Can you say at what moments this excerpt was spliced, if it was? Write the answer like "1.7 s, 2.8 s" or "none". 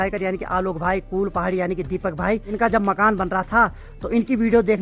none